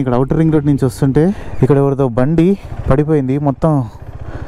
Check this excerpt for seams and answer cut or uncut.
cut